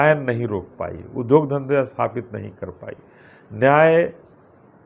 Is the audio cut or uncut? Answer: uncut